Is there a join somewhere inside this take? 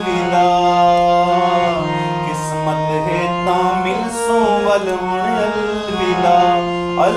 no; 0 cuts

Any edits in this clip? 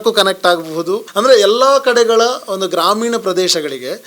yes; 1 cut; at 1.0 s

